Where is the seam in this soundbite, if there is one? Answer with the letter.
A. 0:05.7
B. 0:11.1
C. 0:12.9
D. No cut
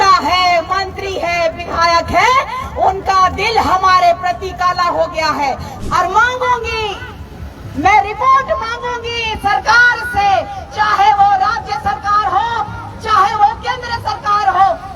A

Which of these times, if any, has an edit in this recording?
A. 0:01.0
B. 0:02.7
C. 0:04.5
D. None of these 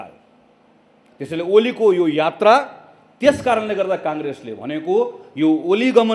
D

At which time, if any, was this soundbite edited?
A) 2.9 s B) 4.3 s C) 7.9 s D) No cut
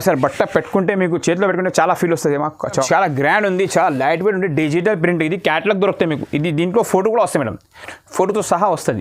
A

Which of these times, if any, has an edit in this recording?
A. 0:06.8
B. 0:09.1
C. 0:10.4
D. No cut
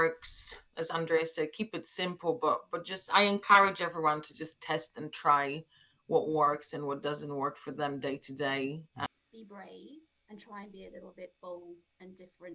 B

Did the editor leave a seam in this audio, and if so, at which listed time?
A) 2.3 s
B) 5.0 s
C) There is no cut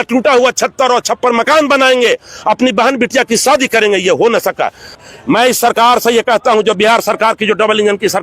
B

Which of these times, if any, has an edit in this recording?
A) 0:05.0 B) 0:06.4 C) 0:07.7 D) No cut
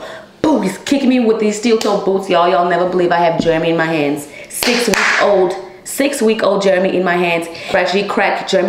C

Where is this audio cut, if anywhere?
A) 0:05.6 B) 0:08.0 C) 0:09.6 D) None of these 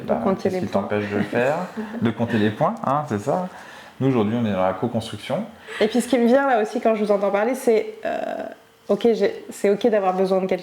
A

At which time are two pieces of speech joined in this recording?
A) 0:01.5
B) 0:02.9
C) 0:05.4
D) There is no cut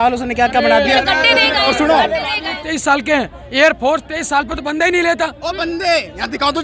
B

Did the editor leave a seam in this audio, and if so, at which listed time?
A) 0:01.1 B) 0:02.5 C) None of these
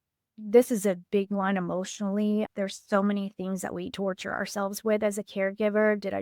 B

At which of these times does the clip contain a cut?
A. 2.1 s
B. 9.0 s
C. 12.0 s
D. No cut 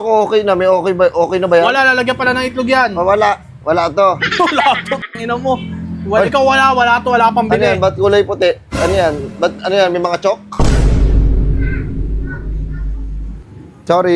D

